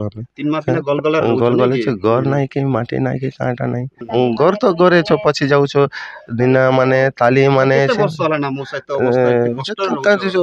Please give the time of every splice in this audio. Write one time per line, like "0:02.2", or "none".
0:03.9